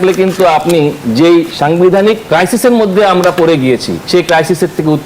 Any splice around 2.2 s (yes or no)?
yes